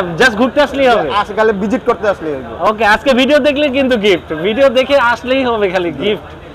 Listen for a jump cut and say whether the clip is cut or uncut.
uncut